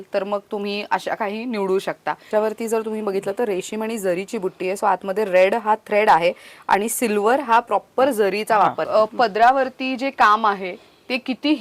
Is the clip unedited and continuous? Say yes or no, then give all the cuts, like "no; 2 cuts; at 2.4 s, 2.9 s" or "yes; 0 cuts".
no; 2 cuts; at 2.3 s, 8.8 s